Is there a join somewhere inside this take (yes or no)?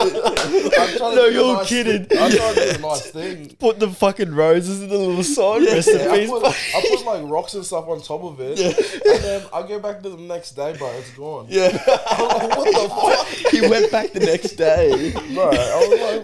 no